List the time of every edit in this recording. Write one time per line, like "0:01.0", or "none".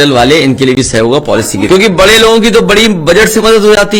0:01.7